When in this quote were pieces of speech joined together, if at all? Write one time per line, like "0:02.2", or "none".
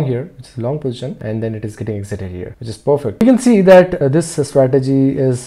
0:03.1
0:04.0